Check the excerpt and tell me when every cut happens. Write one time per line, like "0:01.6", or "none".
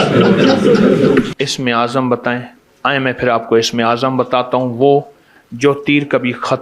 0:01.3